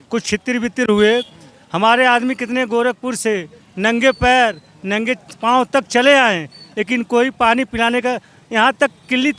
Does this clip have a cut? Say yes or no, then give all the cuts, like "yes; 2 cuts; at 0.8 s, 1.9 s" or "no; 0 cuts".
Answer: no; 0 cuts